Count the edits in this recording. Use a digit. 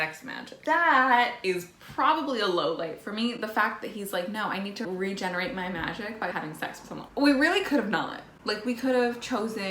2